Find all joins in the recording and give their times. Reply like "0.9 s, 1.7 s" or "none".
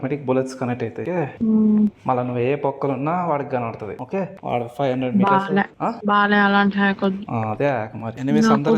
none